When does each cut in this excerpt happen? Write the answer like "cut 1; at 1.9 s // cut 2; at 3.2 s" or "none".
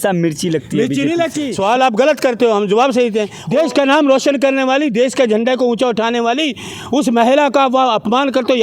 cut 1; at 1.4 s // cut 2; at 3.3 s